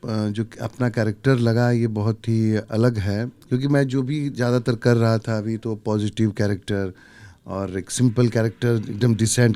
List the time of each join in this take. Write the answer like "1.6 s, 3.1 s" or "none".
none